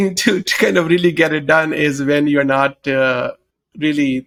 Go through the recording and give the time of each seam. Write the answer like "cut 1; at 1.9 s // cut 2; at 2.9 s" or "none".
none